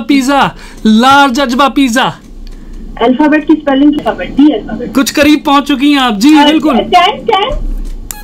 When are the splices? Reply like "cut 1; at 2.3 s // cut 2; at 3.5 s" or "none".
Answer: cut 1; at 4.0 s